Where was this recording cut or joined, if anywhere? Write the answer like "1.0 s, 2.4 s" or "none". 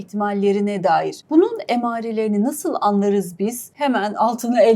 1.2 s, 3.7 s